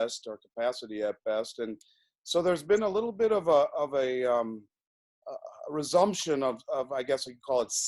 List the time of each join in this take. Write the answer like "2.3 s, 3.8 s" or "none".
none